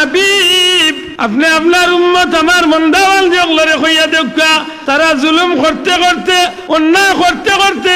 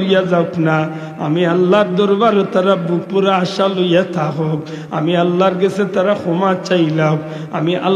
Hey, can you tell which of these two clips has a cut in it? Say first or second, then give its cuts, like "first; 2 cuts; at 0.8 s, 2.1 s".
first; 3 cuts; at 1.0 s, 4.7 s, 6.6 s